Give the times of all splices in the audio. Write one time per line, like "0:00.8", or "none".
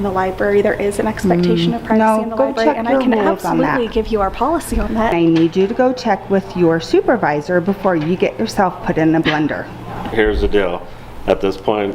0:05.1
0:10.0